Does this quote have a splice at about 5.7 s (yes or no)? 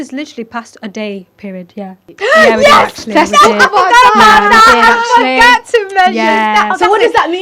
no